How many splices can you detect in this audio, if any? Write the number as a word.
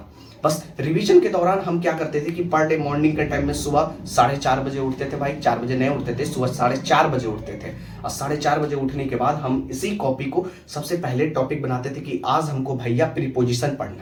zero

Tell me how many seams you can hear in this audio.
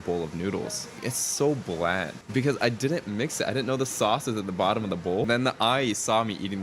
three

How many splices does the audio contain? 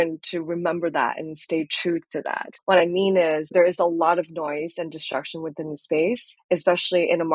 three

